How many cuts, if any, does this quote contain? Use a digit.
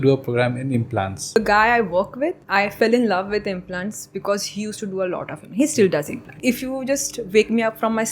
3